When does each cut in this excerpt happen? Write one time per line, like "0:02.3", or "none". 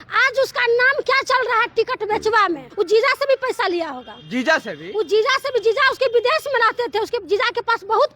0:02.7